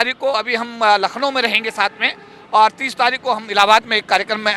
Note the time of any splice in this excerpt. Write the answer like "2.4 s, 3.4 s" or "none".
none